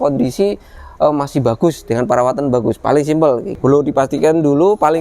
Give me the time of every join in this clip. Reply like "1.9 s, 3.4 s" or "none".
none